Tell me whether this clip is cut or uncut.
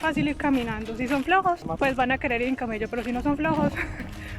cut